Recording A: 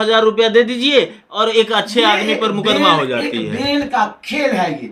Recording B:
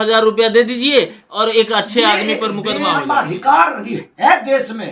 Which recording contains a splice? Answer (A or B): B